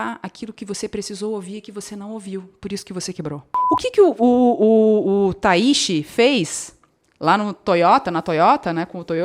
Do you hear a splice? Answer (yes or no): yes